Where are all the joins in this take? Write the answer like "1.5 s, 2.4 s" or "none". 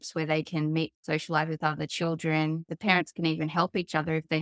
1.0 s